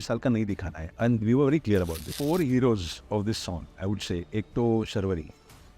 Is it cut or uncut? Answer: cut